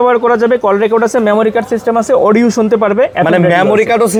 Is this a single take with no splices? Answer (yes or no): yes